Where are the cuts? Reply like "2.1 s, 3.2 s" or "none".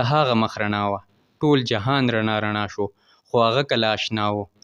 none

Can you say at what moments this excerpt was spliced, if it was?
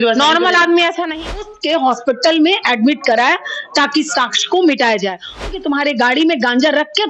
1.5 s, 5.4 s

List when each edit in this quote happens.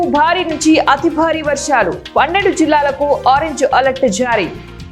none

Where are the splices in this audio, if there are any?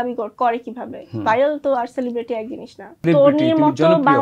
3.0 s

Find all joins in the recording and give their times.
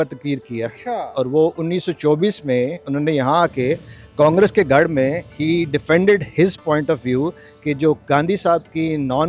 none

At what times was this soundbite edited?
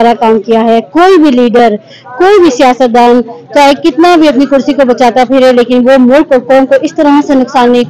none

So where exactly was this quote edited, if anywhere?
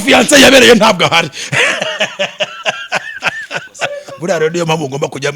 4.1 s

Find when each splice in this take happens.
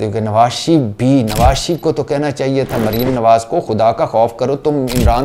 none

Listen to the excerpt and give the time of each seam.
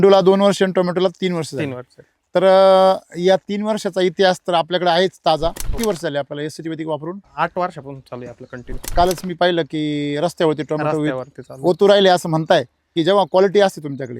5.7 s, 7.3 s, 8.9 s, 12.9 s

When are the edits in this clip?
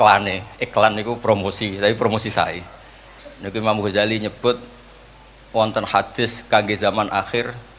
none

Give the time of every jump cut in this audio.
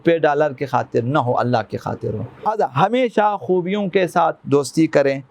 2.4 s

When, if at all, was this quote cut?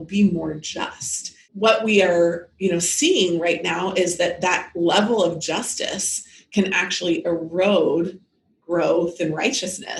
1.5 s

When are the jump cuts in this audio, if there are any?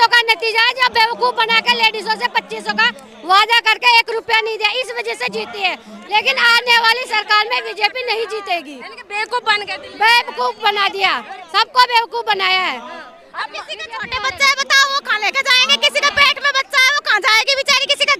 none

